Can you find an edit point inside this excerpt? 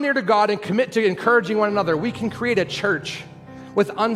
no; 0 cuts

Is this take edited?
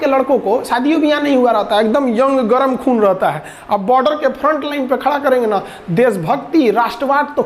no; 0 cuts

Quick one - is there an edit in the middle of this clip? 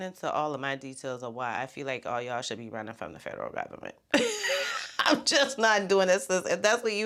no; 0 cuts

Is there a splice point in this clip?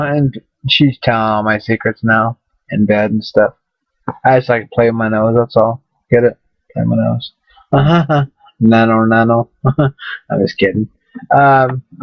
no; 0 cuts

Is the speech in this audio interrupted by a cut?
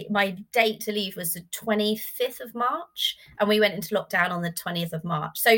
no; 0 cuts

